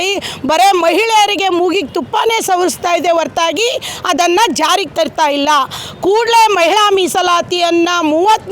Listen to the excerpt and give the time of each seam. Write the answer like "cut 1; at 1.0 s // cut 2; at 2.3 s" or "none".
none